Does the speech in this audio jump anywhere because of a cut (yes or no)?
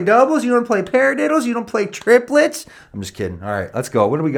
no